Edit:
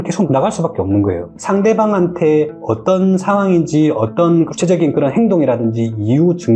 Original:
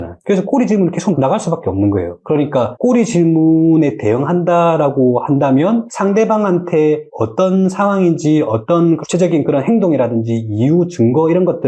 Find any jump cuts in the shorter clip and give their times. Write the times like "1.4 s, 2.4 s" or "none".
1.3 s